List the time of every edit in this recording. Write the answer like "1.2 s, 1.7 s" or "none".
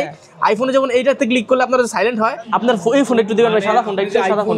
2.4 s